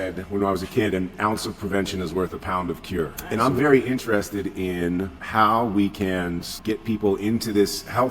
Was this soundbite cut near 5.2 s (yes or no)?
yes